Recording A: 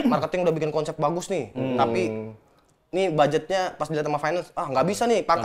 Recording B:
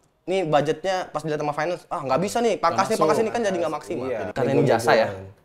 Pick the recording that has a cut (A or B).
B